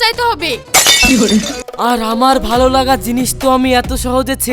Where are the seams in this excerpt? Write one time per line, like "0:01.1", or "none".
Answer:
0:01.6